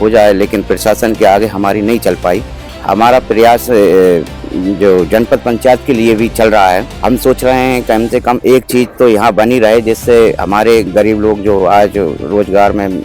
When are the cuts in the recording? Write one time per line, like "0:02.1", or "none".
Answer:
0:02.7
0:06.9